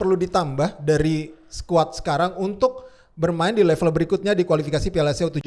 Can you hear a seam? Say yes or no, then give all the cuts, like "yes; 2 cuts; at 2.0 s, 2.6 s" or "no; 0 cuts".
no; 0 cuts